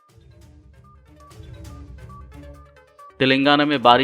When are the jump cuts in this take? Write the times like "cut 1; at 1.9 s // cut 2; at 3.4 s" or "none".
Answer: cut 1; at 2.7 s